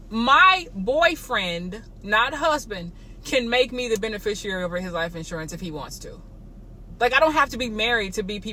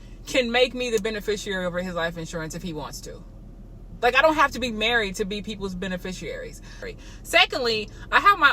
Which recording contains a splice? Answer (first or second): second